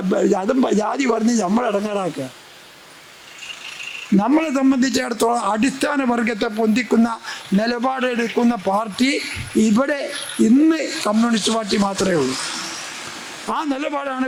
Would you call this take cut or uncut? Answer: uncut